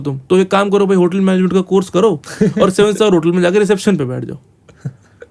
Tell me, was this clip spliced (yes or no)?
no